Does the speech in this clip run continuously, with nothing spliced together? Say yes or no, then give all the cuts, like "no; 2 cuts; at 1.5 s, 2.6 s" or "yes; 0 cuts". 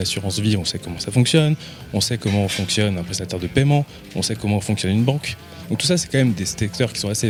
yes; 0 cuts